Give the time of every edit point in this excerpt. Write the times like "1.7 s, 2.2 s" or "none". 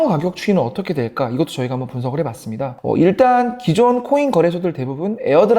2.8 s